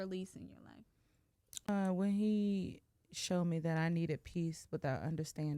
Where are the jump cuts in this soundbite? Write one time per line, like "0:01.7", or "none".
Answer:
0:01.7